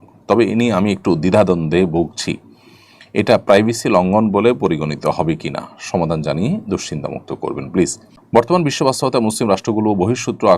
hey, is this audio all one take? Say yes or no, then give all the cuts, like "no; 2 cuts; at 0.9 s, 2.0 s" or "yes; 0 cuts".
no; 1 cut; at 8.1 s